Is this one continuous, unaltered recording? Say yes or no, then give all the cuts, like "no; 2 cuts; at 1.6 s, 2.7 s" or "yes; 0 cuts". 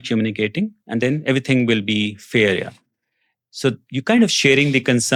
yes; 0 cuts